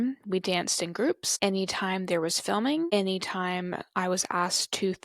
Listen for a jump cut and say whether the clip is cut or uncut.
cut